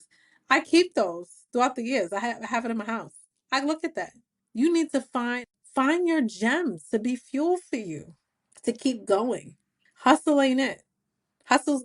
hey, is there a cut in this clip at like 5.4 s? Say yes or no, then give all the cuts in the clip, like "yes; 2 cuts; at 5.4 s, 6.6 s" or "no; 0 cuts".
yes; 1 cut; at 5.4 s